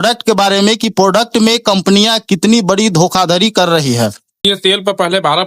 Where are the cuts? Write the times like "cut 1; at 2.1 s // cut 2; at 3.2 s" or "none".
cut 1; at 4.4 s